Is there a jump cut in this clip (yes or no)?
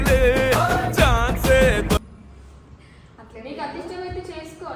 no